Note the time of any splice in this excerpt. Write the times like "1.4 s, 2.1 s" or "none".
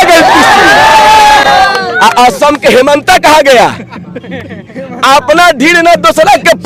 none